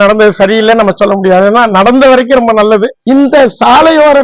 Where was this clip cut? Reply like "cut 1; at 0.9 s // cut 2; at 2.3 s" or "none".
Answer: cut 1; at 3.0 s